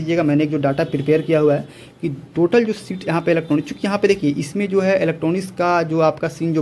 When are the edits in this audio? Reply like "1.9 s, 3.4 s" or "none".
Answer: none